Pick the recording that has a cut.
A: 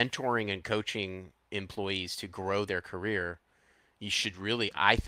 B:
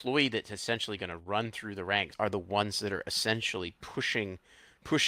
B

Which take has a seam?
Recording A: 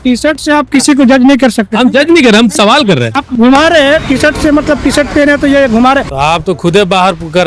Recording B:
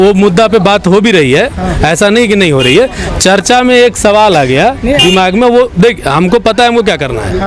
A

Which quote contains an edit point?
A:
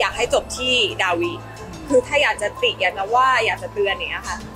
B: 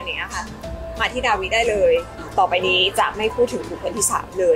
B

